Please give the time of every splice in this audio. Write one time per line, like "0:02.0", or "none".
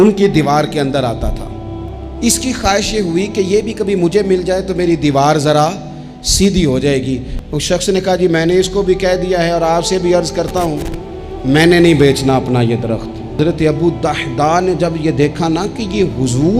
0:07.3
0:13.4